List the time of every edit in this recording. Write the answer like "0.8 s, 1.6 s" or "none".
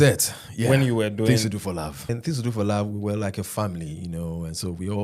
2.1 s